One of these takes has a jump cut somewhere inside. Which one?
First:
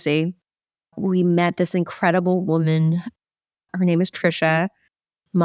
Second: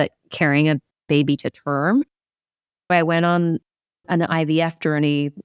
second; 1 cut; at 2.4 s

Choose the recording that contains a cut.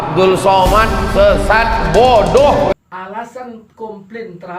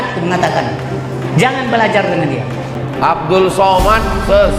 first; 1 cut; at 2.7 s

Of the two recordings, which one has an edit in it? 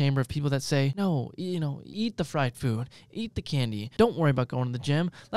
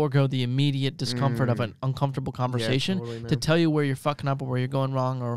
first; 3 cuts; at 0.9 s, 1.8 s, 3.9 s

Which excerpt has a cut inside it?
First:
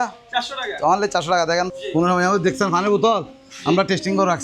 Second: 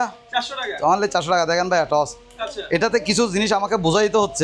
first; 1 cut; at 1.7 s

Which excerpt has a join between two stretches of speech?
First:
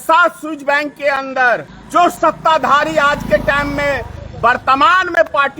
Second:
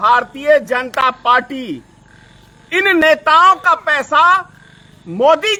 first; 1 cut; at 1.8 s

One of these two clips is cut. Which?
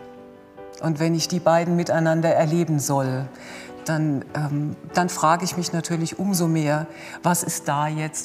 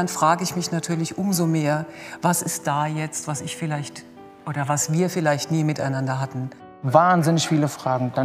second; 1 cut; at 6.9 s

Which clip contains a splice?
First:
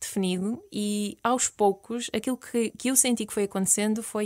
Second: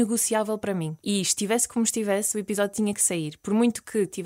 second; 1 cut; at 0.9 s

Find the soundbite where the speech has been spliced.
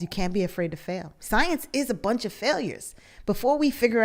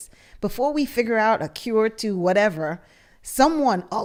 first; 1 cut; at 1.1 s

